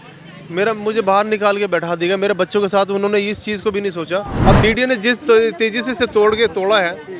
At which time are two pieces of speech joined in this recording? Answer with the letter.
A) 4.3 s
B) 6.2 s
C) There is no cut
A